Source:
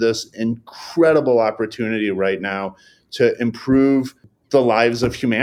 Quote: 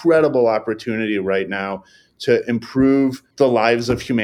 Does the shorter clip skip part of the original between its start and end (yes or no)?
yes